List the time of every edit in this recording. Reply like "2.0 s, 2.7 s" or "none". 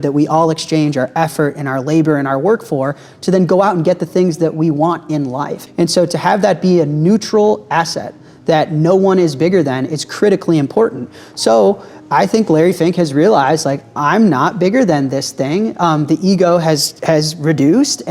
5.6 s